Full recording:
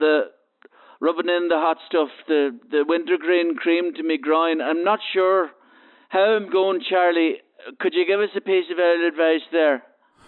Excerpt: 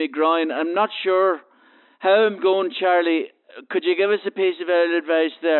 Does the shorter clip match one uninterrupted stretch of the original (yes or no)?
yes